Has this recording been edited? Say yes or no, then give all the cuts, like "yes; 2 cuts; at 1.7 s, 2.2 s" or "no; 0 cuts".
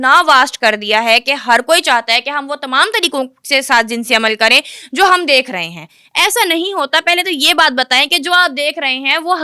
no; 0 cuts